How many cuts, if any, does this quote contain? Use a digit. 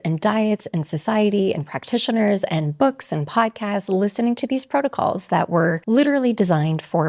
1